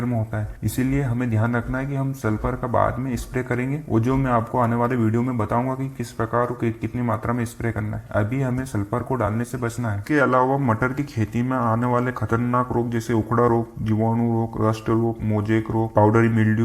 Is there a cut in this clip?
no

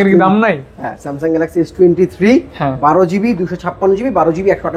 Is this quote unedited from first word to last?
yes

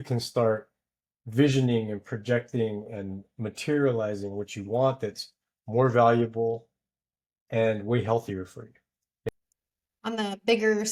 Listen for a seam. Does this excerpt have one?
no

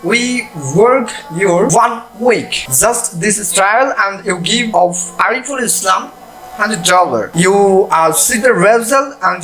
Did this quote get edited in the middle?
yes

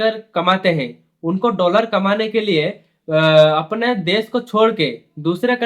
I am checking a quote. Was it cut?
no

